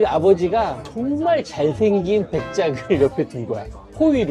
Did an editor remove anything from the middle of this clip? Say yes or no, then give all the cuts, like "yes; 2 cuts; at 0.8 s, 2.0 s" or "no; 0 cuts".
no; 0 cuts